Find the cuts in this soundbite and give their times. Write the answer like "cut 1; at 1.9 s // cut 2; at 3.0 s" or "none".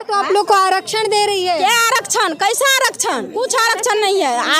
cut 1; at 3.3 s